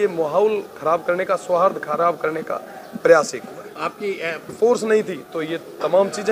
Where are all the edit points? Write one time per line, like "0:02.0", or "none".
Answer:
0:04.5

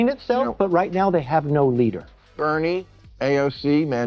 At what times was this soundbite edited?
0:02.1

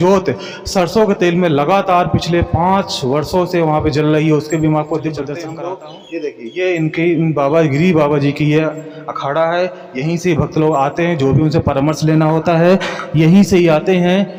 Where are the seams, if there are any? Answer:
none

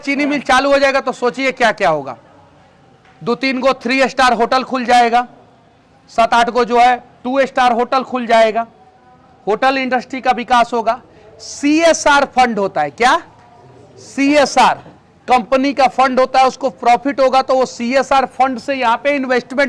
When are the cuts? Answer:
none

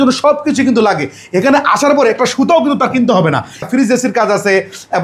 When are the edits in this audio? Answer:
0:03.7

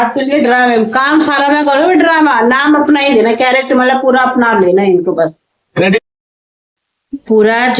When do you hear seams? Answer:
none

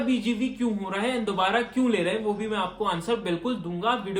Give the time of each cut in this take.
none

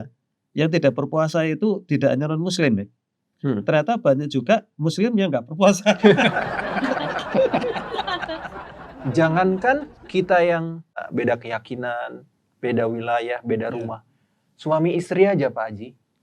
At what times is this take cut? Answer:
0:08.6
0:10.0
0:11.0

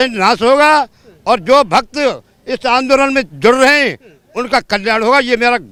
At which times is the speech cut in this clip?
none

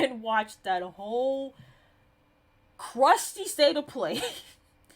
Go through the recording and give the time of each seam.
none

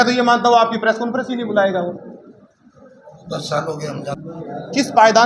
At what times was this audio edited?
0:04.2

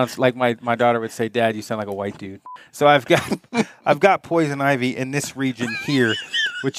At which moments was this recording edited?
0:02.4

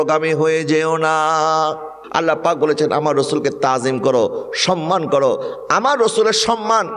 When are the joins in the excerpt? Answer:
0:02.0

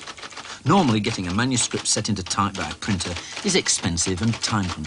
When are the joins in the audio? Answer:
0:01.6

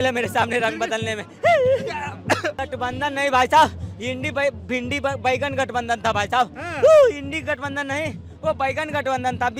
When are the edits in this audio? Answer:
0:02.6

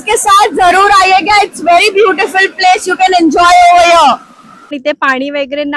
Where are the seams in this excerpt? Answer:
0:04.7

